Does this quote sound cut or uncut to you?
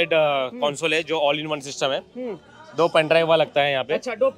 uncut